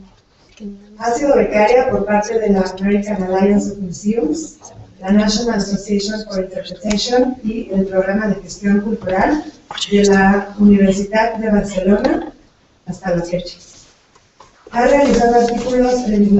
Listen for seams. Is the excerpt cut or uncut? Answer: uncut